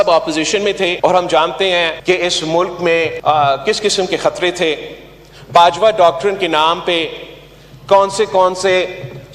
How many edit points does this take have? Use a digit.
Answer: 3